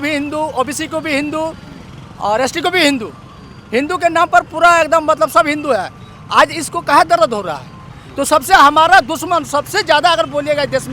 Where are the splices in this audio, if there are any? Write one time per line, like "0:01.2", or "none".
0:07.8